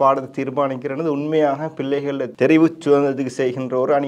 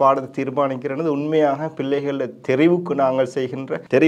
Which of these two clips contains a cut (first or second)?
first